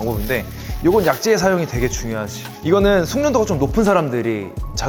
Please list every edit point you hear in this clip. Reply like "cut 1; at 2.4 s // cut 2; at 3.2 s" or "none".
none